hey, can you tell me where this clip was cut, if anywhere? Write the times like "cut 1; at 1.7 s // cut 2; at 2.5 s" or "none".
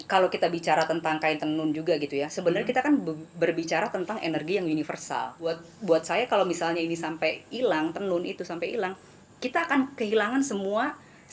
cut 1; at 5.6 s